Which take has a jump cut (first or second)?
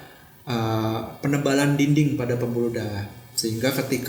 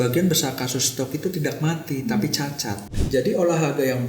second